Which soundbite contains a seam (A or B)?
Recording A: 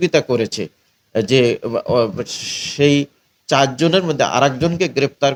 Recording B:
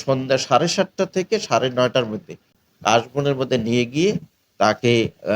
B